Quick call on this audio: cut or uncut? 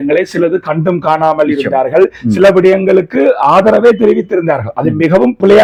uncut